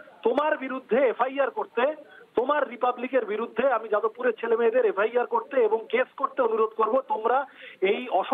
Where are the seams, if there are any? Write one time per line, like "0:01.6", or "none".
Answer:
none

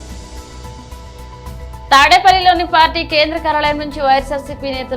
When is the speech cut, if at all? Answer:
0:00.9
0:01.9

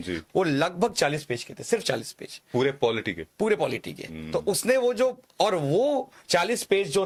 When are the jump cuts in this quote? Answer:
none

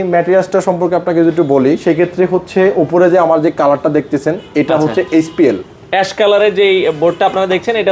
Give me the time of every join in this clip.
none

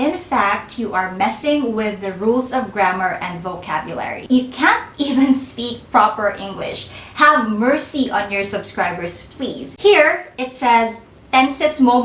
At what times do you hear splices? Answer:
0:04.2
0:09.7

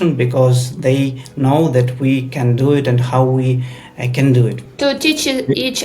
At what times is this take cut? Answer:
0:04.7

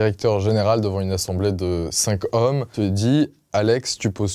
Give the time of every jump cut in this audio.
0:02.7

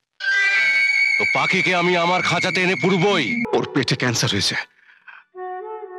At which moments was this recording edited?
0:03.5

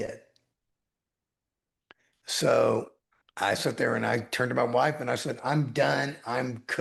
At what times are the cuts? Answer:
none

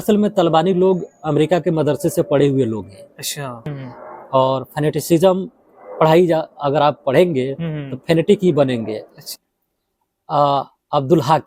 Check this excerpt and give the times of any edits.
0:03.6
0:09.3

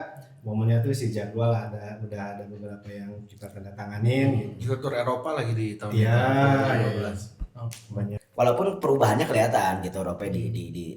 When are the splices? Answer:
0:08.2

